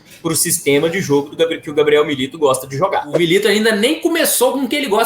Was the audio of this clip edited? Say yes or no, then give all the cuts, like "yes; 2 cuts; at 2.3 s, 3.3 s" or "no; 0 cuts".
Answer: yes; 1 cut; at 3.1 s